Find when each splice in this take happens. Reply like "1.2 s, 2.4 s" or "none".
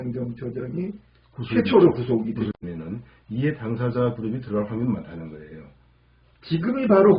2.5 s